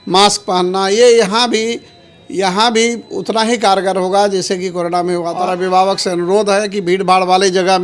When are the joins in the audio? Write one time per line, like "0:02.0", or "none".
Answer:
0:05.5

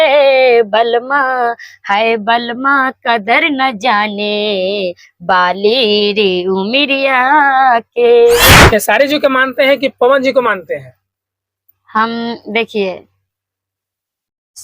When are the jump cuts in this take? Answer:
0:08.5

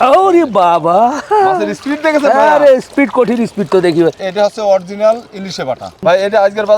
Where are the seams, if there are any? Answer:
0:04.2
0:06.0

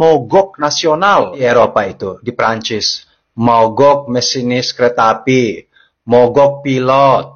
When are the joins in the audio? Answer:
0:01.4

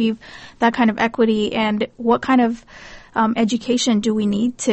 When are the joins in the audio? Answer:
none

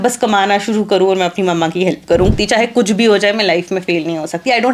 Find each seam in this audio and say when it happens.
0:02.3

